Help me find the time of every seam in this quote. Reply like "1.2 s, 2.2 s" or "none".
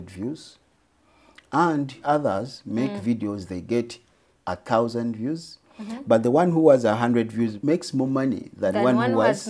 2.0 s, 7.6 s